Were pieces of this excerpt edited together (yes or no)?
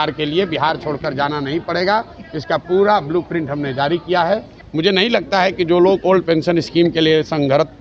yes